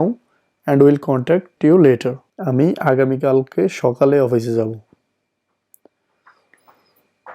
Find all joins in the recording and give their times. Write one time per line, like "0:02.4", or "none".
0:01.5
0:02.3